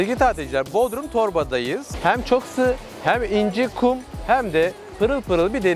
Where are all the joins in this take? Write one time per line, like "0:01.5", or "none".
0:01.9